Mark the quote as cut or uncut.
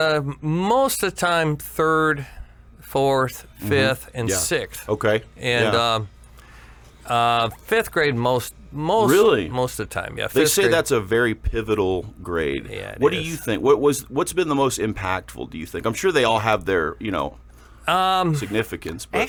uncut